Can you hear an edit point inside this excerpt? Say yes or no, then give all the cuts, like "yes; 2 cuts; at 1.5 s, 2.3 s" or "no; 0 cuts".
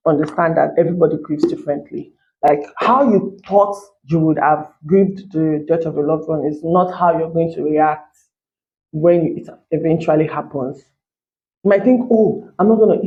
no; 0 cuts